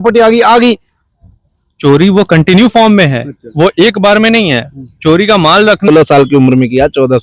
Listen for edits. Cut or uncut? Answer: cut